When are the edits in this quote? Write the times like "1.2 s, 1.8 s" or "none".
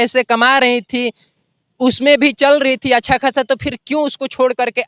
none